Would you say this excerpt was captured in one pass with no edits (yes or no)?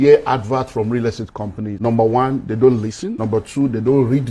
no